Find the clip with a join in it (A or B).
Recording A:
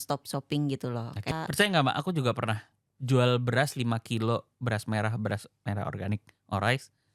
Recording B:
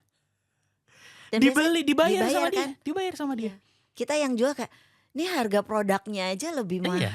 A